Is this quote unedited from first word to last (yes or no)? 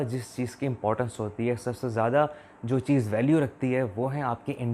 yes